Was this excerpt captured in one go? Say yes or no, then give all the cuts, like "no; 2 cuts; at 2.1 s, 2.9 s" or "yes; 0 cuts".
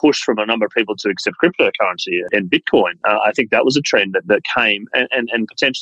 no; 1 cut; at 2.2 s